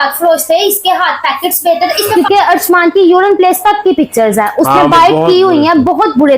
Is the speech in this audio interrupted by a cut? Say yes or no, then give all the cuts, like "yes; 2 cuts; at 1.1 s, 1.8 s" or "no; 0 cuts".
yes; 1 cut; at 2.1 s